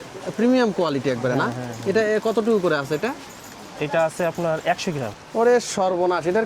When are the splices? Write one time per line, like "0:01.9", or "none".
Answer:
0:05.1